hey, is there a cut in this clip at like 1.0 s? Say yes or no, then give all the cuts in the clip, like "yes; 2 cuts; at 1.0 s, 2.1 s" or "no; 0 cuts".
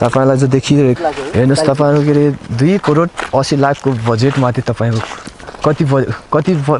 no; 0 cuts